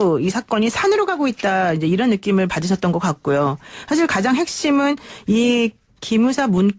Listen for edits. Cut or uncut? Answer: cut